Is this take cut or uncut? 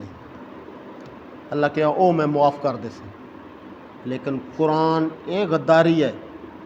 uncut